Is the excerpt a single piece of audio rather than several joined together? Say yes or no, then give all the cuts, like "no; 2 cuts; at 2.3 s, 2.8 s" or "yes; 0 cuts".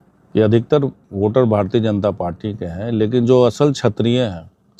yes; 0 cuts